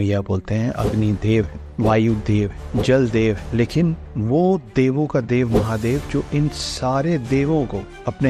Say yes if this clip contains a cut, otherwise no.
no